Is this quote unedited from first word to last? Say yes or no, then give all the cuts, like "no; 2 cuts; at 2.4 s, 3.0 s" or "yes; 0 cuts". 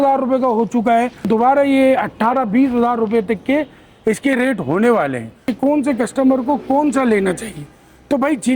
no; 2 cuts; at 1.3 s, 5.5 s